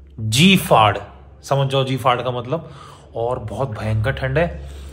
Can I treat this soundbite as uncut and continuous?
yes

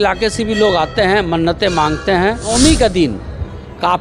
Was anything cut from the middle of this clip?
yes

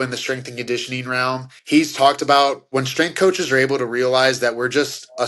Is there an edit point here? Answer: yes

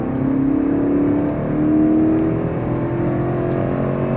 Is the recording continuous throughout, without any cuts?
yes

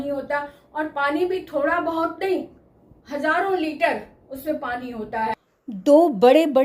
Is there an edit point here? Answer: no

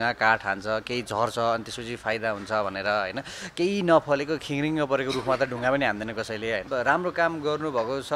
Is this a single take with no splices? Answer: no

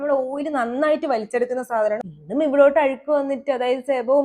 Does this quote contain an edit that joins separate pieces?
yes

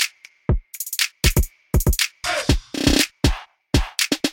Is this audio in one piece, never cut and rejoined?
no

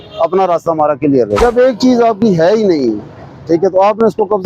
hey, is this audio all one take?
no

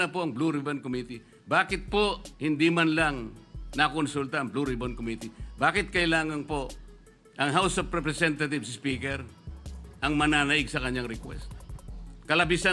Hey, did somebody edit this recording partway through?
no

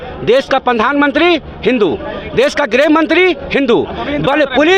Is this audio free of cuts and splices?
yes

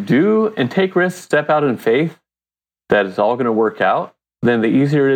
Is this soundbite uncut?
yes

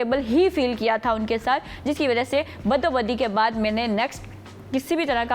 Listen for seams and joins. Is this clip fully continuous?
yes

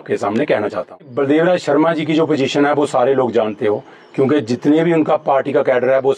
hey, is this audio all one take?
no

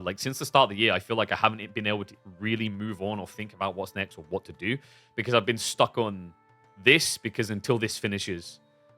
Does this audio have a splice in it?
no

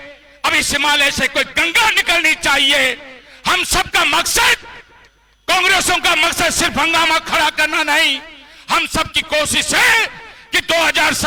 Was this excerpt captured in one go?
yes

